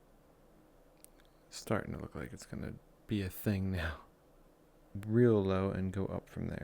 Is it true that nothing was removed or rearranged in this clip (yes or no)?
no